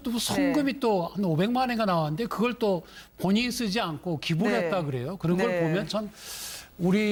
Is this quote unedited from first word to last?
yes; 0 cuts

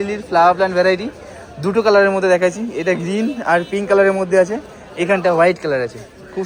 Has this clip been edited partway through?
no; 0 cuts

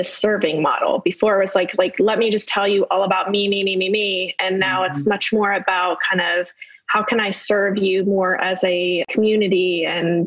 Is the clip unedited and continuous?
no; 1 cut; at 9.1 s

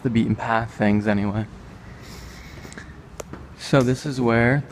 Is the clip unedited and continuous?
yes; 0 cuts

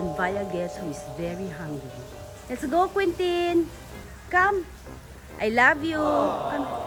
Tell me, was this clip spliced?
no; 0 cuts

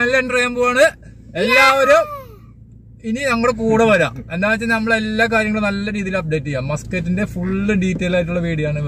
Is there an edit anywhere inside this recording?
no; 0 cuts

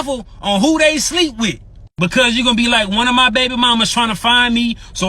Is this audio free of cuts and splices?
no; 1 cut; at 2.1 s

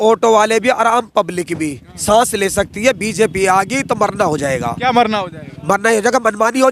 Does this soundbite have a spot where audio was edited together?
no; 0 cuts

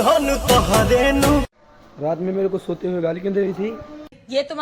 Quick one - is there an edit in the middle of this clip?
yes; 1 cut; at 1.6 s

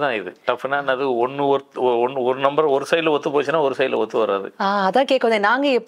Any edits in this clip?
no; 0 cuts

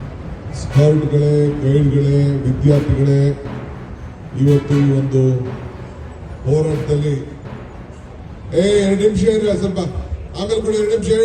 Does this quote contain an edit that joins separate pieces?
no; 0 cuts

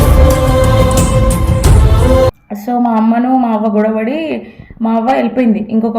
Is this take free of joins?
no; 1 cut; at 2.5 s

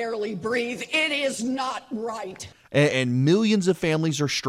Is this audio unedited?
yes; 0 cuts

